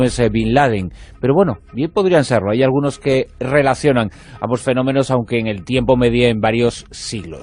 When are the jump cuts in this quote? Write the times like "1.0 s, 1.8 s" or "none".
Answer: 4.9 s